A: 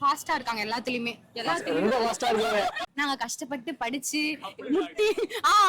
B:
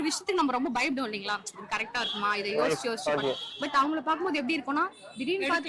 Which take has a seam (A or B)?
A